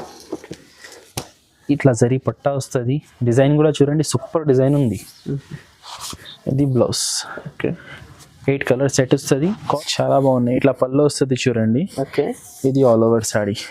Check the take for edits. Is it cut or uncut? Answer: cut